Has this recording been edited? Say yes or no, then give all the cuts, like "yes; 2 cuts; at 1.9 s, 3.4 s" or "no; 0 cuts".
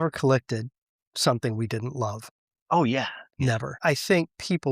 yes; 1 cut; at 3.8 s